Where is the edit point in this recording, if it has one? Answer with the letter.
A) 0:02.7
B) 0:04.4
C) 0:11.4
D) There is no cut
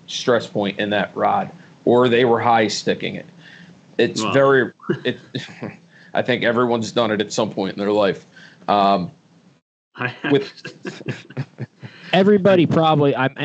D